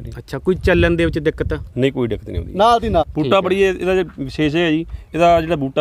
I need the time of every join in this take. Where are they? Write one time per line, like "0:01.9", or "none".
0:03.1

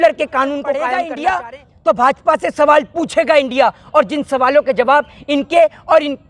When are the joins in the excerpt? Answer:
0:01.0

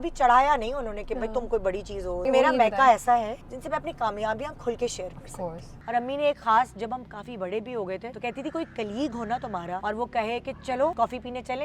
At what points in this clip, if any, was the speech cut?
0:02.2
0:03.4
0:05.7
0:08.1
0:09.8
0:10.9

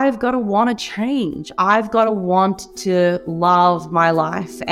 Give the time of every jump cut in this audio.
none

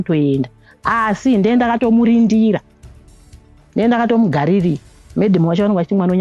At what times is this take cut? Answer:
none

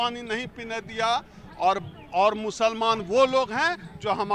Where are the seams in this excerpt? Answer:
none

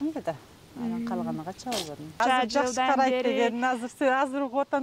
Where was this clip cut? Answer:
0:02.2

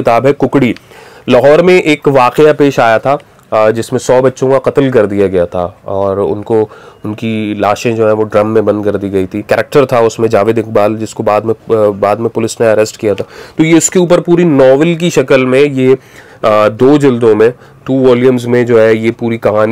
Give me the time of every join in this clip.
0:09.4

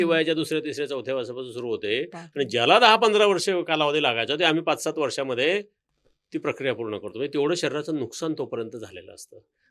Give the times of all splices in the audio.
none

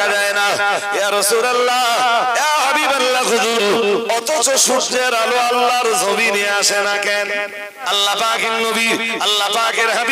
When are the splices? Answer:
0:07.8

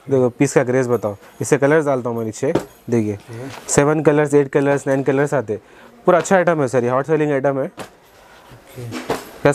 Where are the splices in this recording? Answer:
none

